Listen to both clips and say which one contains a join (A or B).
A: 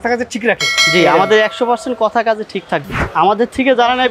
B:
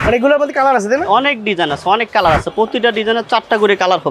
A